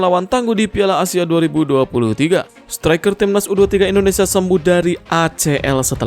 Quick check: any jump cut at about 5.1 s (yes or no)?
no